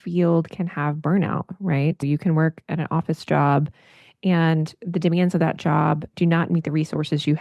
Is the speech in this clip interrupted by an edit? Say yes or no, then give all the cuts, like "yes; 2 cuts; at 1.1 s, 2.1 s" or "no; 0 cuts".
yes; 2 cuts; at 2.0 s, 6.1 s